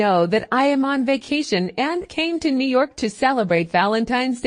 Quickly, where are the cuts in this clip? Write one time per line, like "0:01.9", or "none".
none